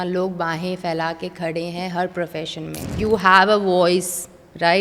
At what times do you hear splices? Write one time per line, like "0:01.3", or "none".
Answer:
0:02.9